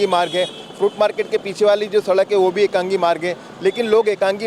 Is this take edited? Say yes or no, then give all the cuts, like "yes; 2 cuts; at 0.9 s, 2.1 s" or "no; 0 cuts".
no; 0 cuts